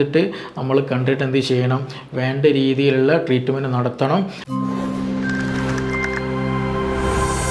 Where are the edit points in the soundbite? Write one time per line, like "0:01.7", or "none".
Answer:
0:04.4

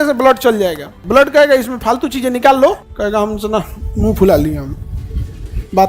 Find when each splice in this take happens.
0:00.9
0:02.9

